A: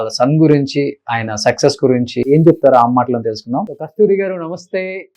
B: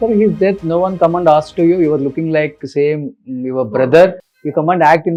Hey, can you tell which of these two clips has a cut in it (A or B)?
A